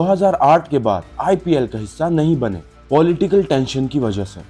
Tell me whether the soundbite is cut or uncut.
uncut